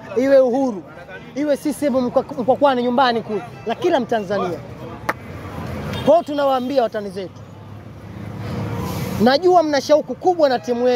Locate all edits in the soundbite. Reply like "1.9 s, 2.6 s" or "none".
5.3 s